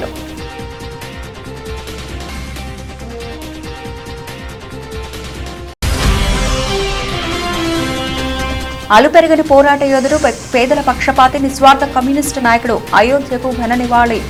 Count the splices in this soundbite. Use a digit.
0